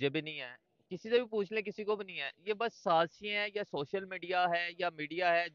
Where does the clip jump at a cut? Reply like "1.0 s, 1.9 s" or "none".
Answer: none